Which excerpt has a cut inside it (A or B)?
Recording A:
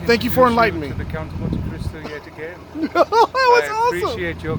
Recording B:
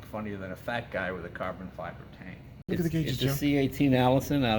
B